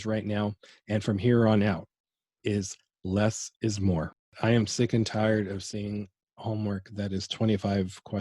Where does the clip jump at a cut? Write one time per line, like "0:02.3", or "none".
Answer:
0:04.3